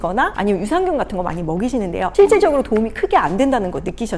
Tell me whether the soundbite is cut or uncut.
uncut